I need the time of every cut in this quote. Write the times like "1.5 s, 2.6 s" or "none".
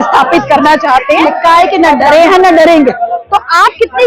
1.2 s